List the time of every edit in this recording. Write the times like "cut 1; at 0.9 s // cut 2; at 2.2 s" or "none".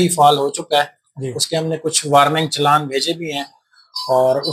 none